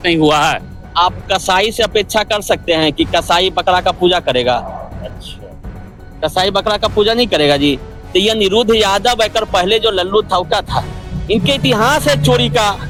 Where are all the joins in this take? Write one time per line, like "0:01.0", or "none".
none